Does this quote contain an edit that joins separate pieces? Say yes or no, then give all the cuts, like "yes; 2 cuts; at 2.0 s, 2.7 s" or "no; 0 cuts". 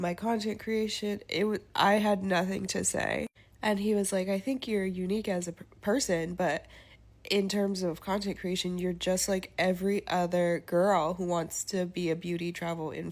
no; 0 cuts